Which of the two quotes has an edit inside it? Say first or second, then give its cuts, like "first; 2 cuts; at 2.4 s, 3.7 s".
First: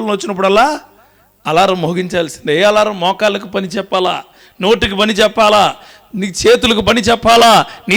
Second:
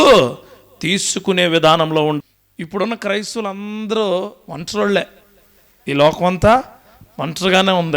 second; 1 cut; at 2.2 s